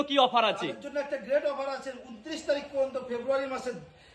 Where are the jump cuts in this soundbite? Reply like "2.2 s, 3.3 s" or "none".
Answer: none